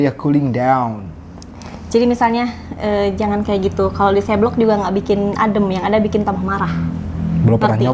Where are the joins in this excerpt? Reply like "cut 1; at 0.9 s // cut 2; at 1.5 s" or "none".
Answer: none